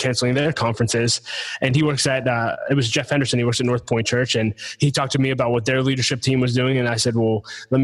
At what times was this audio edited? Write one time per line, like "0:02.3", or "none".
none

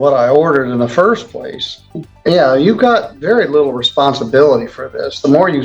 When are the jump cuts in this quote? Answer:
0:02.1

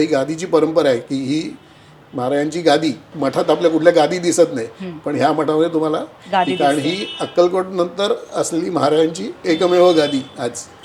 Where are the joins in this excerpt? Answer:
0:03.1

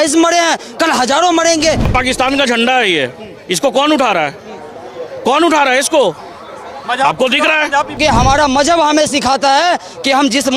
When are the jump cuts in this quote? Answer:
0:01.9
0:08.0

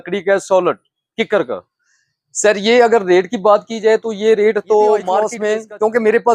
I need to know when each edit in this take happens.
0:05.3

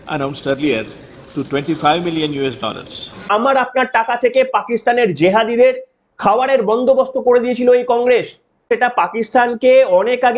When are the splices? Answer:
0:03.2
0:08.7

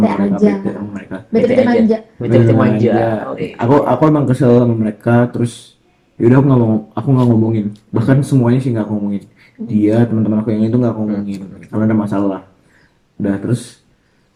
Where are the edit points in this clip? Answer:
none

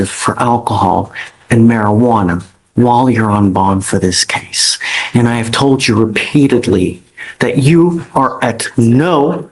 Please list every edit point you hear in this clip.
none

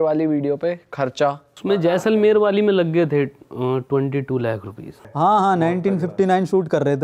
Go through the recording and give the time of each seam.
0:01.5
0:05.0

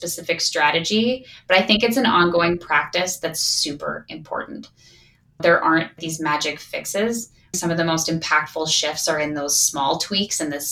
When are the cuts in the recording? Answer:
0:07.6

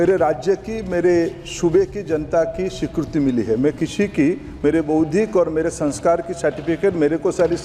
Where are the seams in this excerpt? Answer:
none

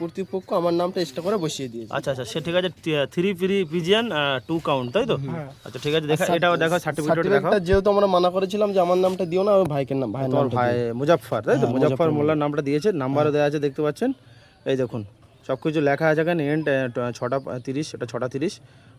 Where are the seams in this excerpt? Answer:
none

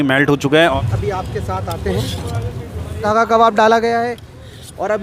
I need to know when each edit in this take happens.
0:00.8
0:03.0

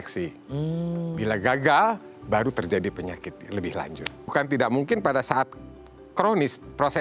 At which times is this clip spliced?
0:04.3

